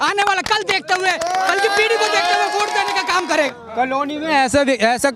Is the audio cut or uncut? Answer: cut